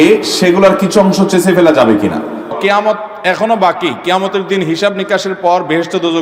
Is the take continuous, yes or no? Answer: no